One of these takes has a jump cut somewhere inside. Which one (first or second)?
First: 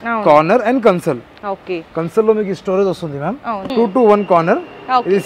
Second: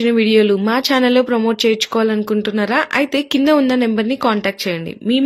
first